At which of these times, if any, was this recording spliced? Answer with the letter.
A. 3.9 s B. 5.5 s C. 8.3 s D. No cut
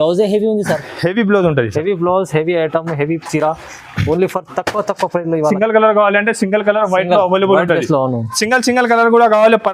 B